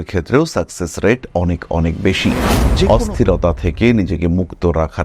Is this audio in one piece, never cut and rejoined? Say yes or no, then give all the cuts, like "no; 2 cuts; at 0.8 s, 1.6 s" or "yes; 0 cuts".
no; 1 cut; at 2.9 s